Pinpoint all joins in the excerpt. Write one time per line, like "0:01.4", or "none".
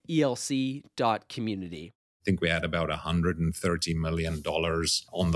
0:02.1